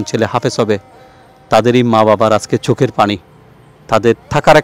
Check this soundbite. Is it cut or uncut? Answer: uncut